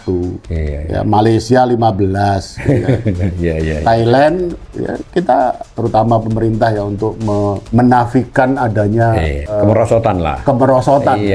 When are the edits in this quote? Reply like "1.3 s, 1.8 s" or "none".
5.7 s, 7.6 s, 9.6 s